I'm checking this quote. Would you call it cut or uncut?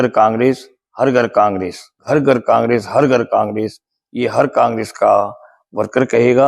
cut